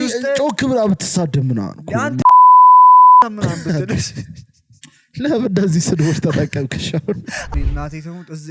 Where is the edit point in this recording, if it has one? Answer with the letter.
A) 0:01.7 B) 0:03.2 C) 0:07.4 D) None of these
C